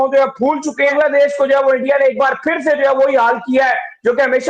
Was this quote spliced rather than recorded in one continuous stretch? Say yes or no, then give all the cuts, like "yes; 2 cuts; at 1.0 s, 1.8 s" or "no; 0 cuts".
yes; 1 cut; at 0.9 s